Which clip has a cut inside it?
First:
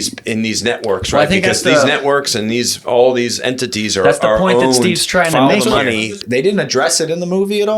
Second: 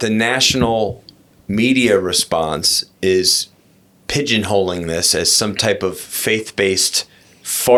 first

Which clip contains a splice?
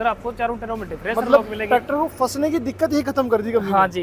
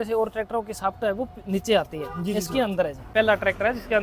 second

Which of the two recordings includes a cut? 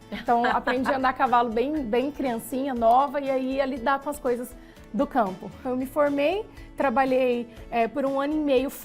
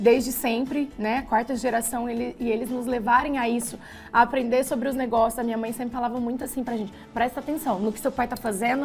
first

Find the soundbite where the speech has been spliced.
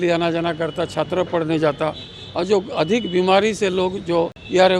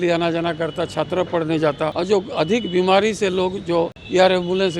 second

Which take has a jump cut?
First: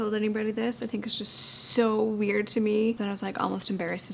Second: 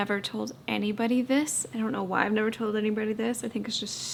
first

